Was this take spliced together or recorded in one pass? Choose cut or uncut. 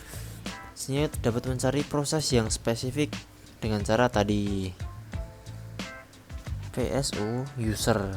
cut